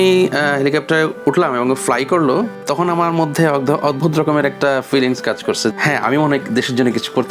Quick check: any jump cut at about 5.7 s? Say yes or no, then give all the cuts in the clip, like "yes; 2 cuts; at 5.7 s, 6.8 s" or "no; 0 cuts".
yes; 2 cuts; at 2.6 s, 5.7 s